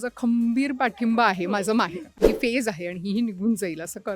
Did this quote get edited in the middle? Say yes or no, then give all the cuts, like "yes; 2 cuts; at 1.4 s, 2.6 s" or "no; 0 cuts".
yes; 1 cut; at 2.1 s